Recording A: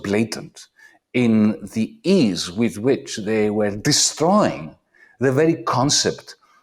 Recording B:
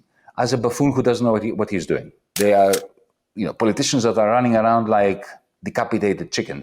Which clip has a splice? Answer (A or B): B